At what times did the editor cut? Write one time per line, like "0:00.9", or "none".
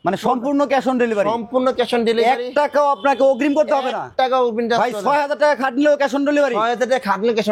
none